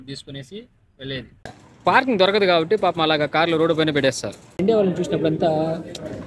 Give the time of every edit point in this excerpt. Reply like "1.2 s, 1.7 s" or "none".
1.3 s, 4.6 s

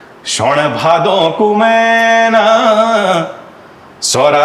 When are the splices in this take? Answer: none

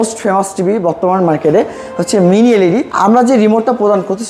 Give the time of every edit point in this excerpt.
2.9 s

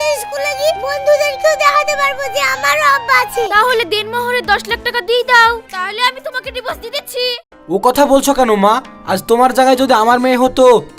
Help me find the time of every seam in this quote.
3.5 s, 7.6 s

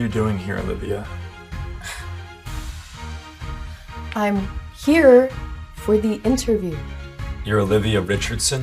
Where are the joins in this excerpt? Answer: 1.1 s, 3.7 s

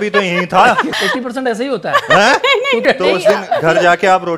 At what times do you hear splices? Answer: 0.9 s, 2.8 s

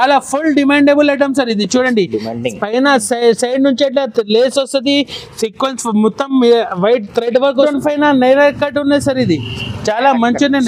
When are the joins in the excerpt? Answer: 7.7 s

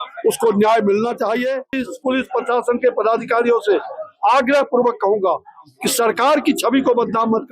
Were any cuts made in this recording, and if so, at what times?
1.9 s

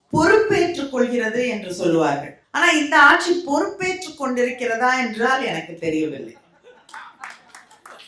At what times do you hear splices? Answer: 2.4 s

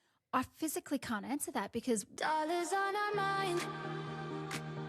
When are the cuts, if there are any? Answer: 2.1 s

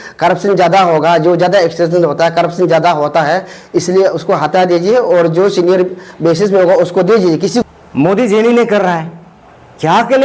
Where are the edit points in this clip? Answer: 7.6 s

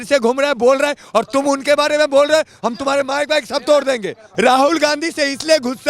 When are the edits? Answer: 4.2 s

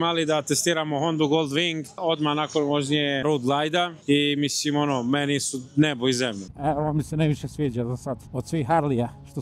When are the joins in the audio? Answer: 6.5 s

